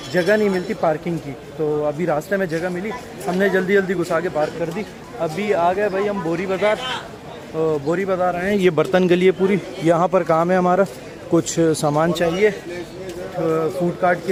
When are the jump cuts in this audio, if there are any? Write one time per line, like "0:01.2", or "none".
none